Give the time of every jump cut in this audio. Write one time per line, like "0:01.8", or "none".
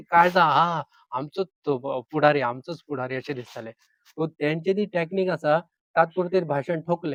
none